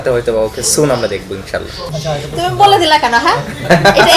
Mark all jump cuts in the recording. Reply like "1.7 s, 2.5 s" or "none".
1.9 s